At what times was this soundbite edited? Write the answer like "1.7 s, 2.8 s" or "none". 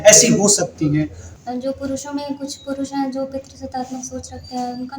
1.2 s